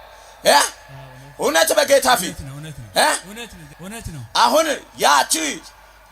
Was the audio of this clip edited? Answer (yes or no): yes